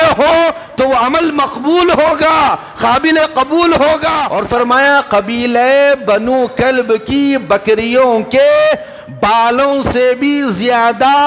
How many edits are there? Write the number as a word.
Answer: one